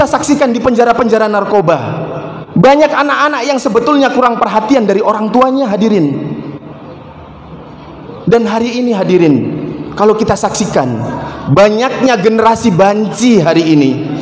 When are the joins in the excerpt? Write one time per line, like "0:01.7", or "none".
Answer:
0:07.8